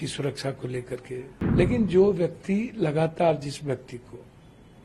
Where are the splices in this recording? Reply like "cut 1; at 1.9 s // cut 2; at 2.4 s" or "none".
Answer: cut 1; at 1.4 s